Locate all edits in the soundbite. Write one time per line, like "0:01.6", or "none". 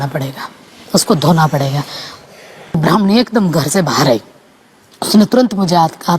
0:02.8